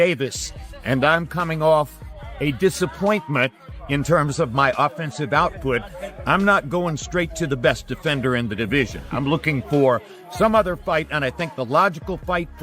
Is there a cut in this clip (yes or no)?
no